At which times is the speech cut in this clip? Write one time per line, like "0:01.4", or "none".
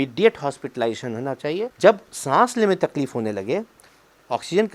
0:01.7